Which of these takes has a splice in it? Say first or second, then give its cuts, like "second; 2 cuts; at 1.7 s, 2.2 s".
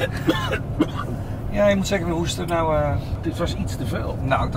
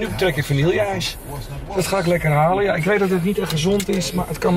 first; 1 cut; at 3.2 s